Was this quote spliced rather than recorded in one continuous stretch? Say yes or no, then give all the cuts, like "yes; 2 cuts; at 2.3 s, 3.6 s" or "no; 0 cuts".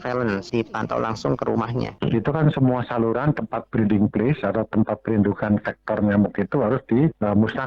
yes; 1 cut; at 1.9 s